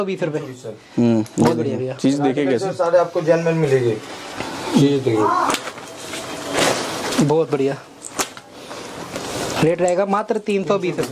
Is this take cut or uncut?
uncut